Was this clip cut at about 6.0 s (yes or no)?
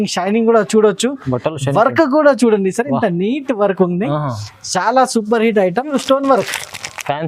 yes